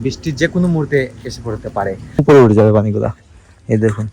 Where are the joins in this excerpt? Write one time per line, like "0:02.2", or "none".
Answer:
0:02.2